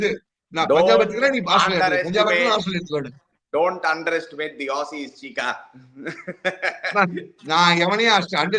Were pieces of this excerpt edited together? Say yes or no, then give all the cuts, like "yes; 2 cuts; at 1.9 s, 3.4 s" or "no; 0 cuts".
no; 0 cuts